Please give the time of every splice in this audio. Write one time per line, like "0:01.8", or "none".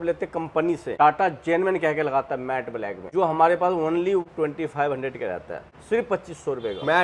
0:01.0
0:03.0
0:04.3
0:05.7